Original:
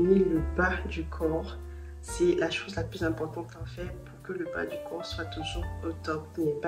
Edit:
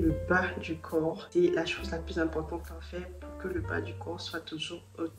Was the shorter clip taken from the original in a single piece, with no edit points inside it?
no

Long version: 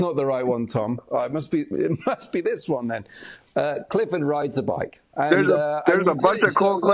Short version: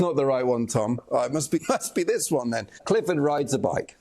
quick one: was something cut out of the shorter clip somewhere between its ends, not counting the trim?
yes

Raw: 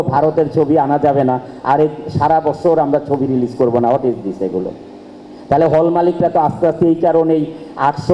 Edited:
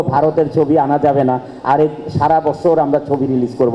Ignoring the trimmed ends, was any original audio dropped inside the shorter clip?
no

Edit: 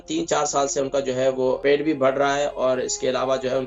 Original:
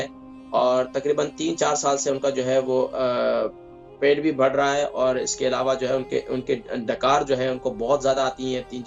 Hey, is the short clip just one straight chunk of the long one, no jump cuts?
no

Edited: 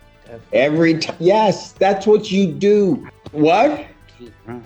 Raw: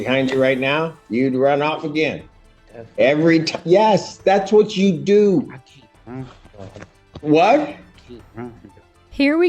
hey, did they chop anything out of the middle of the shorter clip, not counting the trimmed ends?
yes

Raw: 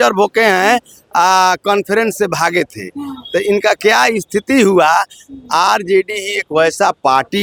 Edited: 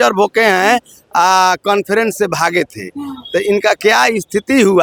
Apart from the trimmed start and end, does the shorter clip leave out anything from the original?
no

